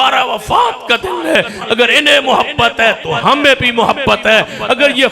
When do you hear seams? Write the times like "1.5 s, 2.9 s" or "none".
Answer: 1.6 s

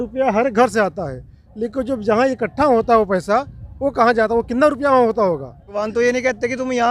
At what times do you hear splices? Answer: 5.8 s

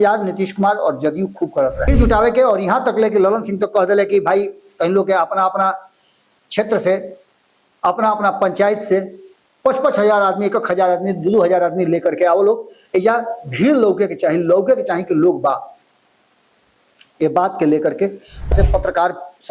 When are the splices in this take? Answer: 1.9 s, 18.5 s

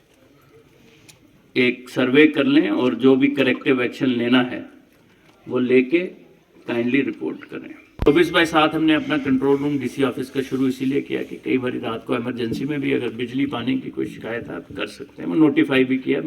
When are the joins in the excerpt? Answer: 8.1 s

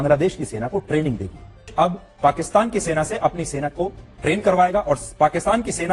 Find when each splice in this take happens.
1.7 s

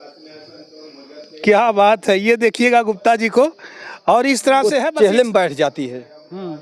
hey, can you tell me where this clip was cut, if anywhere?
4.9 s

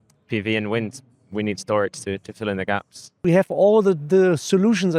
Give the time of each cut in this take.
3.1 s

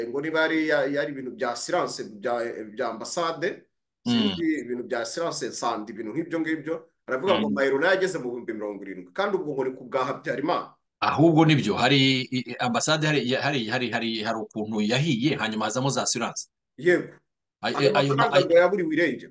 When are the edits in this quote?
10.8 s

